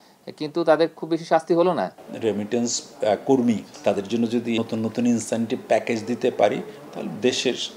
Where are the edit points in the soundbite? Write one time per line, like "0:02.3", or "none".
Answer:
0:02.1
0:03.7
0:04.6